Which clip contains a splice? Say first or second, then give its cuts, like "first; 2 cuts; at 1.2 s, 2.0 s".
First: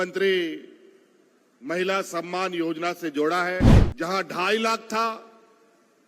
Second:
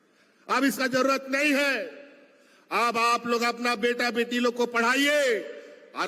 first; 1 cut; at 3.8 s